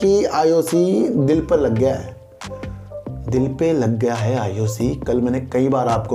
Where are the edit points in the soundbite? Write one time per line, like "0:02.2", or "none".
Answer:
none